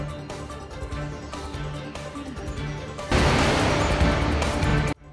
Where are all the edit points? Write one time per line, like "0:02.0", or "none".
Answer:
none